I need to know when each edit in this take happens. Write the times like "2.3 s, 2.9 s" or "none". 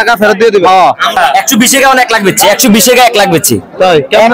1.2 s